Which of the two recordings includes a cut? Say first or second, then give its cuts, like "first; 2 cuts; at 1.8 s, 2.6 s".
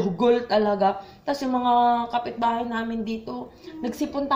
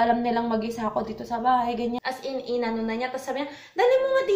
second; 1 cut; at 2.0 s